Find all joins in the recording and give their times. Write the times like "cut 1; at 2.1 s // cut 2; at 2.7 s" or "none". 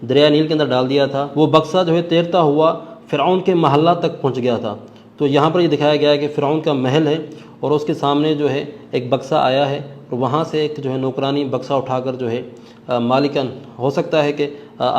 cut 1; at 1.2 s